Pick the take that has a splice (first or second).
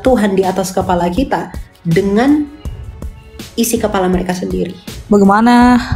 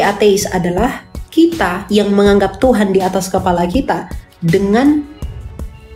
first